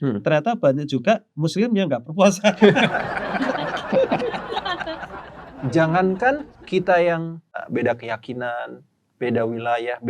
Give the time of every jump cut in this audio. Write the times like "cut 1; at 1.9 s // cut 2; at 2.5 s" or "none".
cut 1; at 5.1 s // cut 2; at 6.5 s // cut 3; at 7.6 s